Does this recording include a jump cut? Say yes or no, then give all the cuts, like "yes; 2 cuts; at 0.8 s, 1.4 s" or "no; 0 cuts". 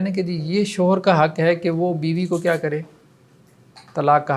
no; 0 cuts